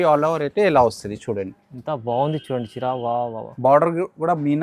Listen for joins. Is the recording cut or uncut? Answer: uncut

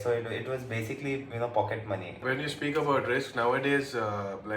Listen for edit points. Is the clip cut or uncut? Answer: cut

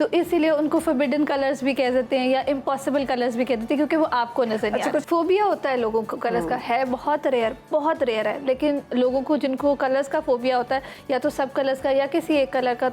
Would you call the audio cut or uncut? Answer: cut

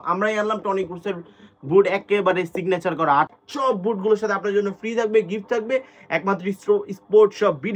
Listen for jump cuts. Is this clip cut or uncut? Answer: cut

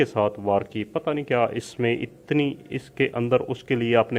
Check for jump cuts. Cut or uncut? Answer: uncut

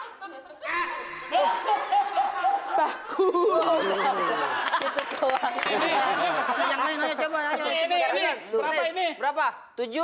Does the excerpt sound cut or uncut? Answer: cut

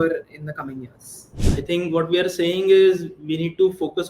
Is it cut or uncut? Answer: cut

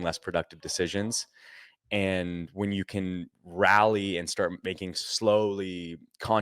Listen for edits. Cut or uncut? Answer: cut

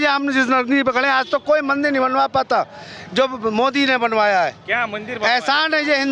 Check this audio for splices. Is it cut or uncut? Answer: uncut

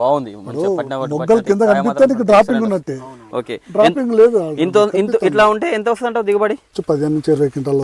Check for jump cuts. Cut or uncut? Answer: cut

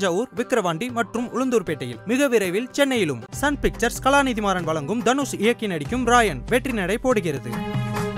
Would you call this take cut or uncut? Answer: uncut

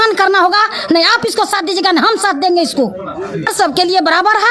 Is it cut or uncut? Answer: cut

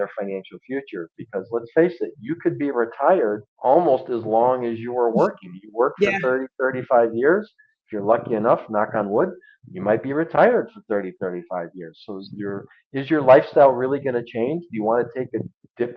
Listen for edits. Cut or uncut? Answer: cut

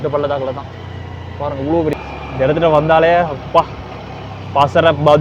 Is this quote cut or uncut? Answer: cut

